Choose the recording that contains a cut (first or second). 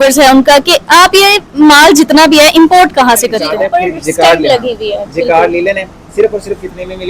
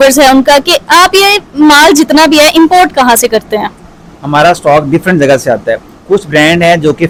first